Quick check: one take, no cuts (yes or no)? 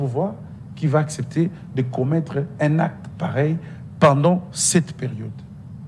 yes